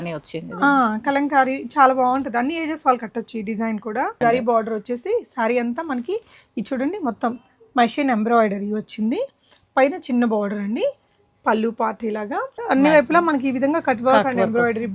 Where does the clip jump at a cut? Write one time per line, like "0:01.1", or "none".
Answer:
0:04.2
0:12.6